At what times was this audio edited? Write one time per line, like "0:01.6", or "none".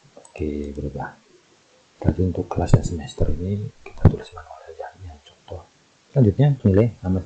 none